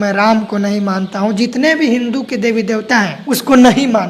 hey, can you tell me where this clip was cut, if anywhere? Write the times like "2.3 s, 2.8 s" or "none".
3.2 s